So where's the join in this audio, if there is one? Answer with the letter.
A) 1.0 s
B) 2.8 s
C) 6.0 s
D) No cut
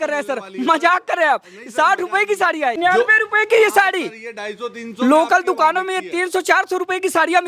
B